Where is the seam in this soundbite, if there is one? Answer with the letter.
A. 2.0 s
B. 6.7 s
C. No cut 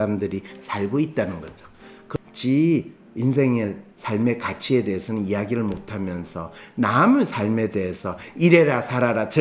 A